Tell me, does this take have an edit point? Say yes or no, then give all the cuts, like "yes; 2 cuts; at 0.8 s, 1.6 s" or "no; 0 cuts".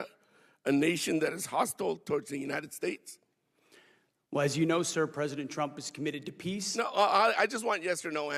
no; 0 cuts